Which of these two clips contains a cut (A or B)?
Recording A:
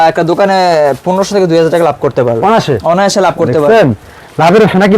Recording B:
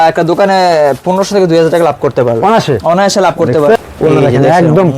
B